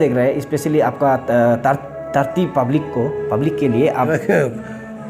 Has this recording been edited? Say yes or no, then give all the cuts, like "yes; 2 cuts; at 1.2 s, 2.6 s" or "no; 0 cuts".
yes; 1 cut; at 4.1 s